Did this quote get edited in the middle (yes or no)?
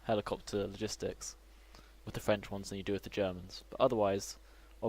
yes